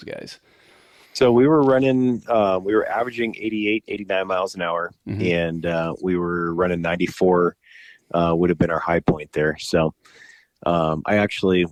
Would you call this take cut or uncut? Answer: uncut